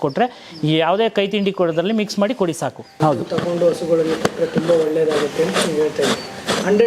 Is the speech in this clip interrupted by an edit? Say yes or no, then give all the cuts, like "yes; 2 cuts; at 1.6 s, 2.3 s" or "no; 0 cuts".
no; 0 cuts